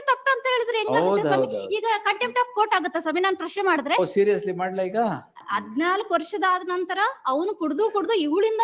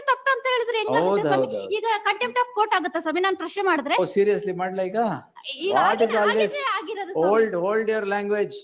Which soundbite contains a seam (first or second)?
first